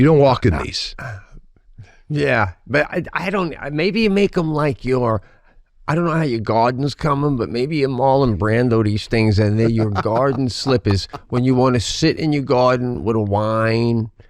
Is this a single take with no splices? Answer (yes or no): yes